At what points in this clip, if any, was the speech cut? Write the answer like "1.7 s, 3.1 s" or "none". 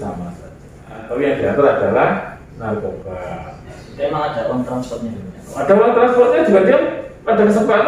1.1 s